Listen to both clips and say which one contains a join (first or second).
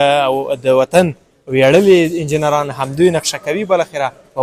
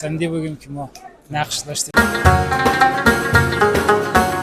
second